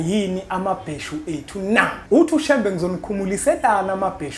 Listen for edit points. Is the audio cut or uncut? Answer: cut